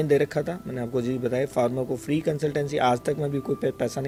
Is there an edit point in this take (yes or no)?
no